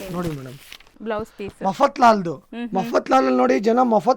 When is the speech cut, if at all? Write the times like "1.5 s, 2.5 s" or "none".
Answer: 0.9 s